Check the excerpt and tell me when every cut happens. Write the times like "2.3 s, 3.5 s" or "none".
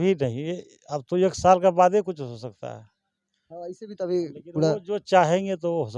none